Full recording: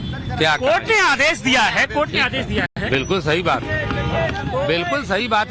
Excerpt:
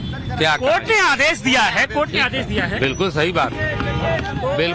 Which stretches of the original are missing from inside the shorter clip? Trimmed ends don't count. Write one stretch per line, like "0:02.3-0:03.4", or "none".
0:02.7-0:02.8